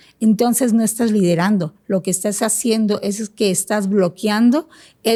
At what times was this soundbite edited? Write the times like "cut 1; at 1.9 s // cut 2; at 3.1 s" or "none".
none

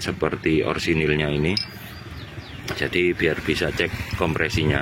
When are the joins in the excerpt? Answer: none

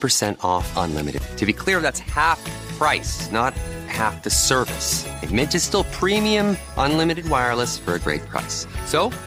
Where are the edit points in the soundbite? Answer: none

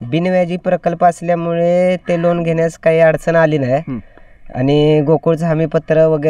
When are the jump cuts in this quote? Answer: none

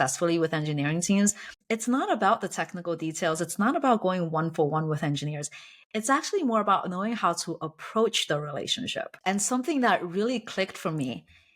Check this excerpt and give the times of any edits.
cut 1; at 1.6 s // cut 2; at 9.1 s

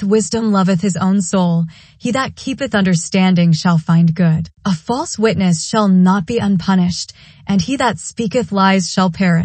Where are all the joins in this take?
cut 1; at 4.5 s

